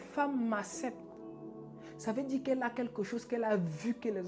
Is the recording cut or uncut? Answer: uncut